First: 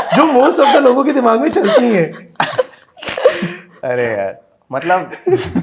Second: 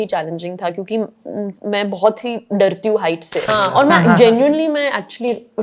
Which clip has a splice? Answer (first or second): second